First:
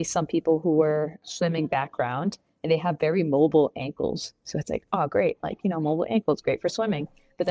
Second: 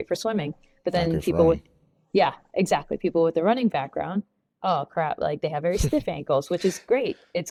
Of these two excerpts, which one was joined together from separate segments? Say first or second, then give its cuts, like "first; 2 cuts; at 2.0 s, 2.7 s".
first; 1 cut; at 1.2 s